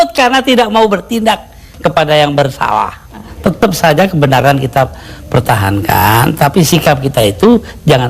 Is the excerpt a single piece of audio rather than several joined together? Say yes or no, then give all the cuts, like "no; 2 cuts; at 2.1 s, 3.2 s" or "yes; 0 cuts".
no; 1 cut; at 3.3 s